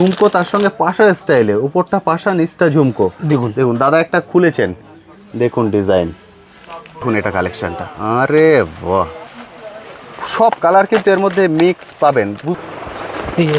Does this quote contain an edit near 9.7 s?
no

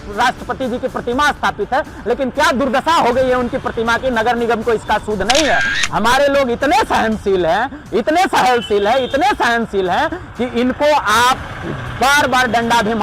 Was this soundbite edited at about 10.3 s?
no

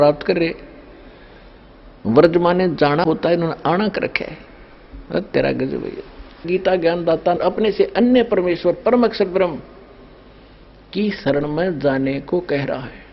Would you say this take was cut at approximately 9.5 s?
no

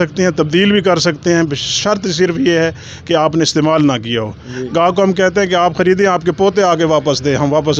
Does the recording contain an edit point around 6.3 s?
no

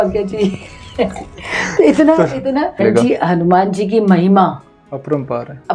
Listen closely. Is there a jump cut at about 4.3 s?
no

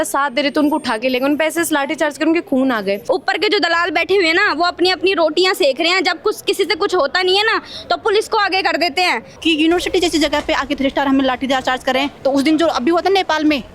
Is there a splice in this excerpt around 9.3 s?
yes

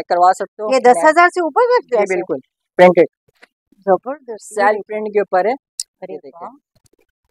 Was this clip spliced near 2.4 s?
no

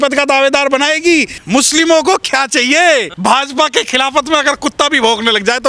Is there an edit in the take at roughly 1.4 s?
yes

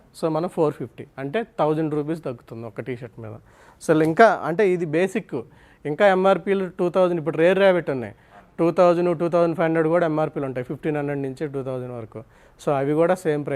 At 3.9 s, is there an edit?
no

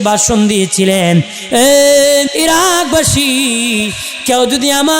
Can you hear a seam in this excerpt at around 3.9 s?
no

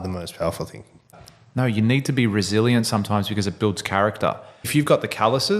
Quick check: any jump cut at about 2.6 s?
no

